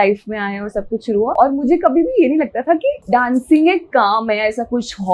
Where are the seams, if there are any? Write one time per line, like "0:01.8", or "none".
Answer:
0:01.3
0:03.0